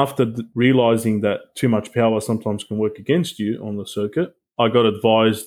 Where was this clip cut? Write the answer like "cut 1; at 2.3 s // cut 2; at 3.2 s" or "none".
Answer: none